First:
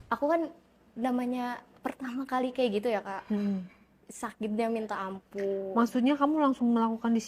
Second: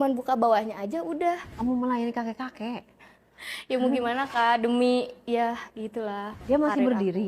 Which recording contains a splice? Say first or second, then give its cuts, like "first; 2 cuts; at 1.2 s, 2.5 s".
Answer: second; 2 cuts; at 1.5 s, 6.4 s